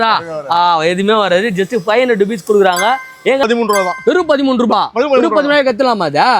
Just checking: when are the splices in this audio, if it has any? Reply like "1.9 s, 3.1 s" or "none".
3.4 s